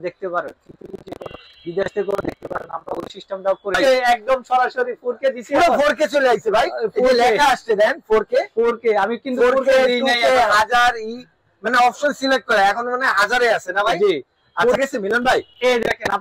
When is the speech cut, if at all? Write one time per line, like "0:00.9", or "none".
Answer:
0:03.7
0:14.8